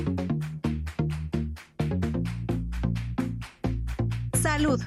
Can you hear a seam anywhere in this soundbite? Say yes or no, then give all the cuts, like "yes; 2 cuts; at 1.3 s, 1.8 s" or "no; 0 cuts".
no; 0 cuts